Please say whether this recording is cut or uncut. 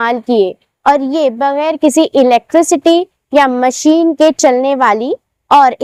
uncut